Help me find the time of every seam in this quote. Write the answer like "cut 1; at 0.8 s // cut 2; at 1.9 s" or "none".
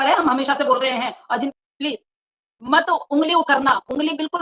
cut 1; at 1.5 s